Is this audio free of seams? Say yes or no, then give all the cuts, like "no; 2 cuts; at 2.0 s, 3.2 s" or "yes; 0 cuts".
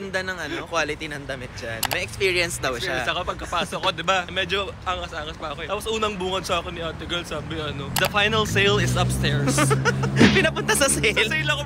yes; 0 cuts